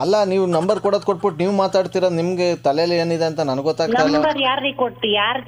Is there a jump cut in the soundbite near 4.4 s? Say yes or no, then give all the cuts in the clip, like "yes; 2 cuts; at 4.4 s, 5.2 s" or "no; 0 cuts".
no; 0 cuts